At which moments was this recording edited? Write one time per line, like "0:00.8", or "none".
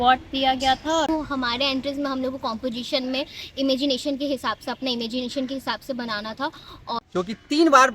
0:01.1
0:06.9